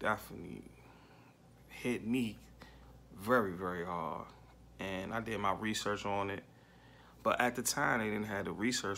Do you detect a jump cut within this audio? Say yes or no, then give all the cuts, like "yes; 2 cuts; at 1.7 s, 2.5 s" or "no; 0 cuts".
no; 0 cuts